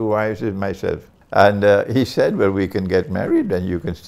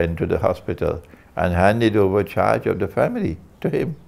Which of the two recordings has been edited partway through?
first; 1 cut; at 1.1 s

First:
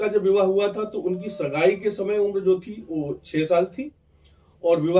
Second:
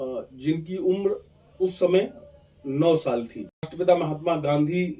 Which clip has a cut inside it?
second; 1 cut; at 3.7 s

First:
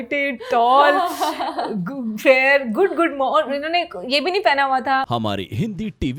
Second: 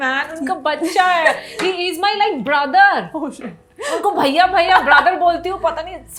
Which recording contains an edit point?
first; 1 cut; at 5.1 s

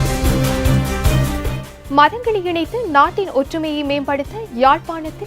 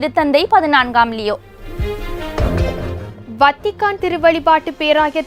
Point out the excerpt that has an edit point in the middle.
first; 1 cut; at 1.6 s

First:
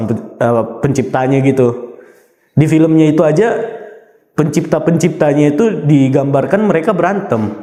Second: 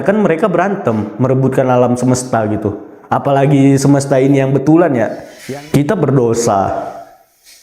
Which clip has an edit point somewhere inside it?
second; 1 cut; at 5.3 s

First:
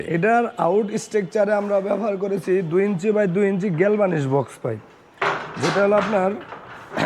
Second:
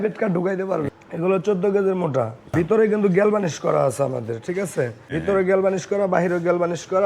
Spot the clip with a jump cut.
second; 3 cuts; at 0.9 s, 2.5 s, 5.0 s

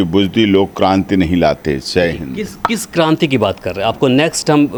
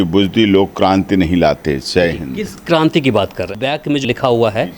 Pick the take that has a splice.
second; 2 cuts; at 2.6 s, 3.6 s

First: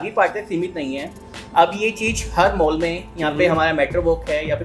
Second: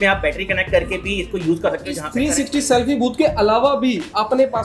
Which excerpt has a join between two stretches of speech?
second; 1 cut; at 2.0 s

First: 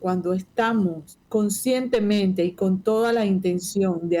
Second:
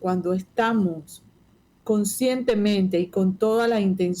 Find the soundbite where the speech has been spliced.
first; 1 cut; at 1.1 s

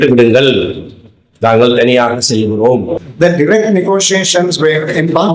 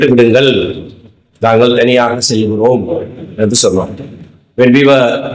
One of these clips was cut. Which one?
first; 1 cut; at 3.0 s

